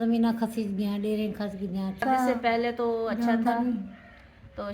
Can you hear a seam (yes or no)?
yes